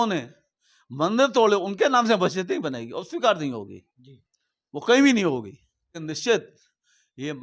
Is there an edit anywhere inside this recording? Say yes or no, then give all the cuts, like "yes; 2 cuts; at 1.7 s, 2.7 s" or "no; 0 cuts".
yes; 1 cut; at 6.0 s